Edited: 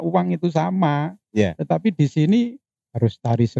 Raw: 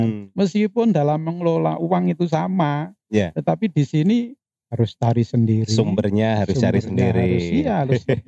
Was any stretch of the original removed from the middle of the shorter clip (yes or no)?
no